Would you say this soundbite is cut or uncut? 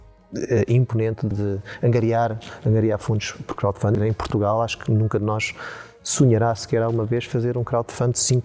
cut